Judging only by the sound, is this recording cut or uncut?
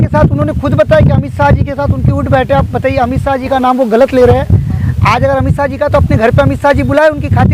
uncut